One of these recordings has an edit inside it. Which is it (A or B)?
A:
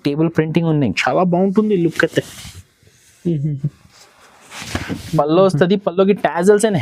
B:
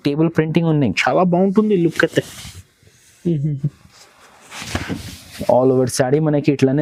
A